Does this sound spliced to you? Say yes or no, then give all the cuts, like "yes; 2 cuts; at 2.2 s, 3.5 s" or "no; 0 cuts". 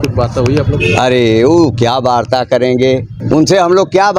yes; 1 cut; at 3.1 s